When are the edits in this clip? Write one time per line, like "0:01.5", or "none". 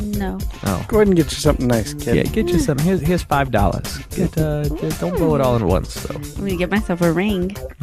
none